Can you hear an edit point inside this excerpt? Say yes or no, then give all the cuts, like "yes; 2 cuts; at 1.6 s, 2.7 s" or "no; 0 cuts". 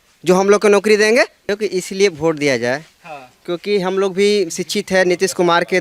yes; 1 cut; at 1.5 s